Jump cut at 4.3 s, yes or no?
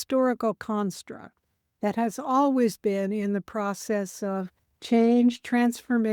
no